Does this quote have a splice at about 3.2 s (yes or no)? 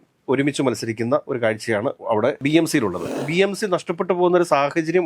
yes